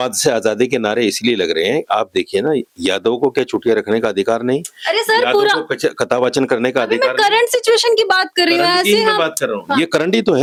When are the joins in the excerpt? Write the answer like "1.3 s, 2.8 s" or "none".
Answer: none